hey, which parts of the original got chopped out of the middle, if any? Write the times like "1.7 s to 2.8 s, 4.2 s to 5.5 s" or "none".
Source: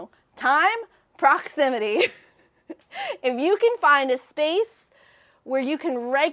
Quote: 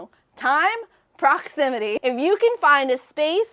2.0 s to 3.2 s